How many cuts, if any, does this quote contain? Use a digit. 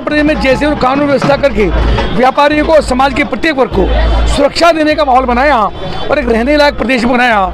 0